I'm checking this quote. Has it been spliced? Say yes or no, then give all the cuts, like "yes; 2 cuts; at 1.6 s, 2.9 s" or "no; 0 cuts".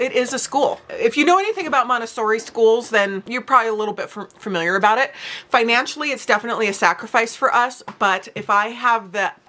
no; 0 cuts